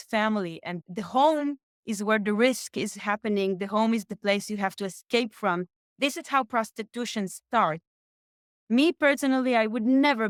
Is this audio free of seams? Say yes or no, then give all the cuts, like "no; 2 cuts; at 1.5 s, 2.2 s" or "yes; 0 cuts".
yes; 0 cuts